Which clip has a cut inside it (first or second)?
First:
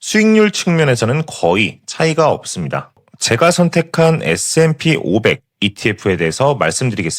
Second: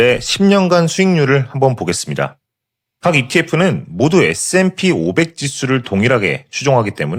first